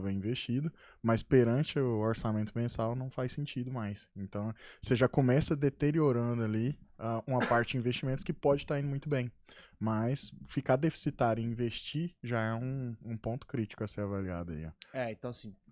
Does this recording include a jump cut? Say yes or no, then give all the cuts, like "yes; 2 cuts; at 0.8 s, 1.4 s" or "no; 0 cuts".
no; 0 cuts